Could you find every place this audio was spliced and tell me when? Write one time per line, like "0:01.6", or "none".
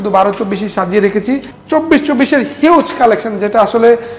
0:01.5